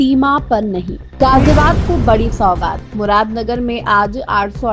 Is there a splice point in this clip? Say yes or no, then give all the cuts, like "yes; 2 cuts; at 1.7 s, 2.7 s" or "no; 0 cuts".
yes; 1 cut; at 1.0 s